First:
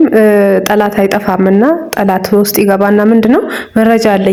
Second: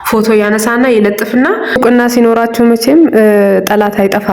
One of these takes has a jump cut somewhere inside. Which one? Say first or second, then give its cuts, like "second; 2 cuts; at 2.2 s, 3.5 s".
second; 1 cut; at 1.8 s